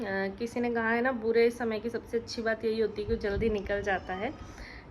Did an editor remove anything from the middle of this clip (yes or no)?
no